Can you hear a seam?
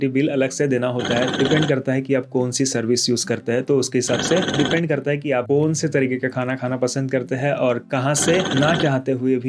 yes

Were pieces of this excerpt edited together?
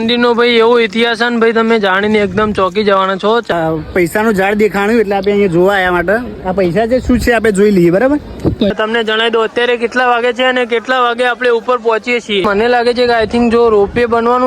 yes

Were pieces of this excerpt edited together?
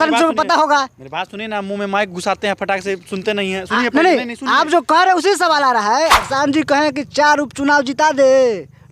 yes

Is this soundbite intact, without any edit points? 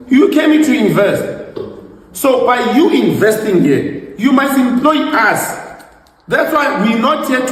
yes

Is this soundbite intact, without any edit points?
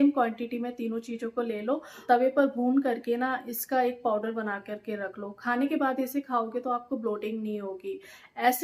yes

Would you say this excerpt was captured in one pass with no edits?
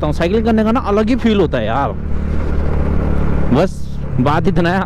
yes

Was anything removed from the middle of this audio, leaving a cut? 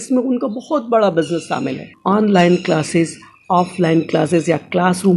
yes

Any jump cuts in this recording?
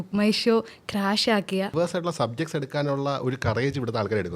yes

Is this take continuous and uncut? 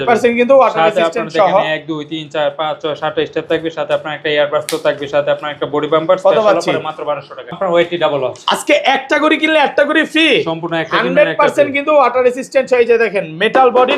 no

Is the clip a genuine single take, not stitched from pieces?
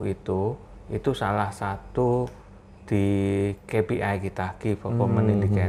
yes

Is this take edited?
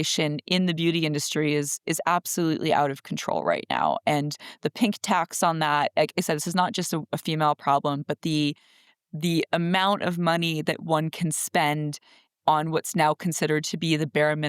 no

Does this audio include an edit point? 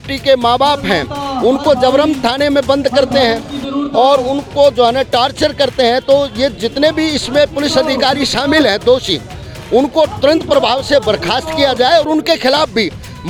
no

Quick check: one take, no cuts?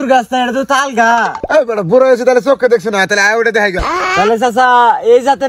no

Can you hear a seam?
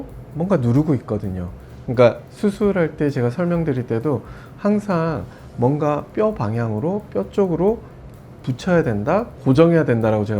no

